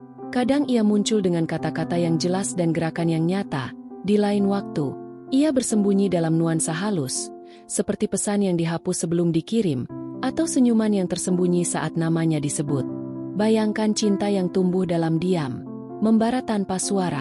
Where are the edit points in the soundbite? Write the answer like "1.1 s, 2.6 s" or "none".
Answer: 13.0 s